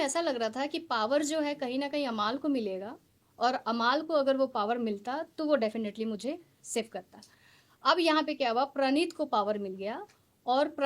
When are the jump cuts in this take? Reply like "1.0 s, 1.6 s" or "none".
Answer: none